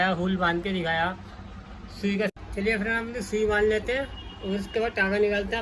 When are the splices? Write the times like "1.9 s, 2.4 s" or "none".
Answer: 2.3 s